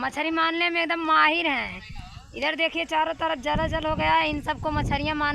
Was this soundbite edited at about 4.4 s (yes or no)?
no